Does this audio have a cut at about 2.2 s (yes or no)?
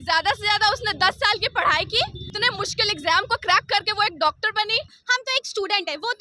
yes